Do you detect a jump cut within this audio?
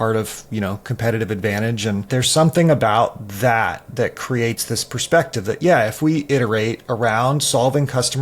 yes; 1 cut; at 2.1 s

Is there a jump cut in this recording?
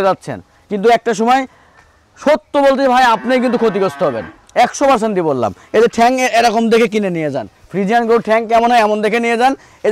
no; 0 cuts

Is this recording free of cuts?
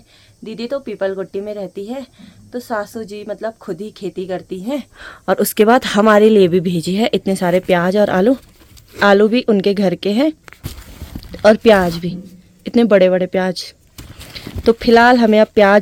yes; 0 cuts

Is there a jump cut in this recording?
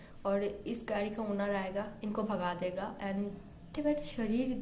yes; 1 cut; at 3.7 s

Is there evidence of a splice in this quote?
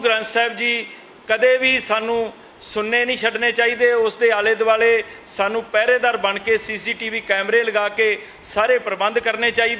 no; 0 cuts

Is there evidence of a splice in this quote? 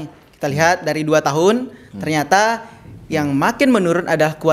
no; 0 cuts

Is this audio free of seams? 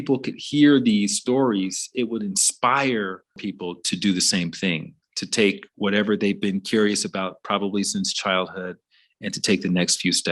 no; 1 cut; at 3.5 s

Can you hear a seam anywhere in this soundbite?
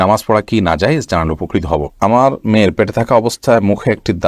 yes; 1 cut; at 1.9 s

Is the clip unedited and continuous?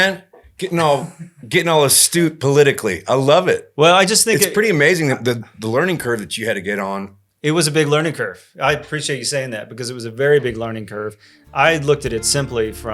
yes; 0 cuts

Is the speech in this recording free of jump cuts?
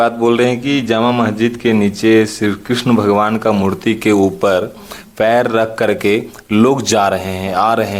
yes; 0 cuts

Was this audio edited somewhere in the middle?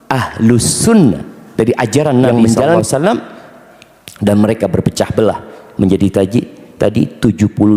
yes; 1 cut; at 1.4 s

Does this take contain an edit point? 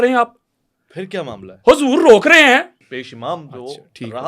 yes; 1 cut; at 2.8 s

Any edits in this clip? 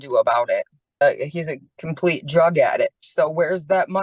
yes; 1 cut; at 1.0 s

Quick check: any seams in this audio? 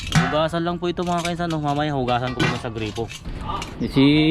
yes; 1 cut; at 3.3 s

